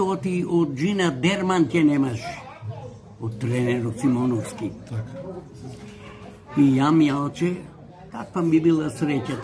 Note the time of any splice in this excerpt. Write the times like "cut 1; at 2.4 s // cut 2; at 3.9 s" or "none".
none